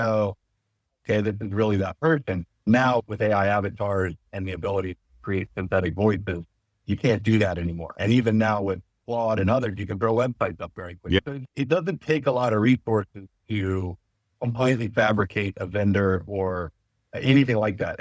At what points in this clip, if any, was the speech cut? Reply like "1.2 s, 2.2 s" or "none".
none